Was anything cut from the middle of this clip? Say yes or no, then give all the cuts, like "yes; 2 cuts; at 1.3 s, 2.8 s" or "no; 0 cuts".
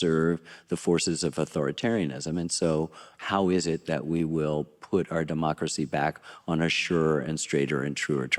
no; 0 cuts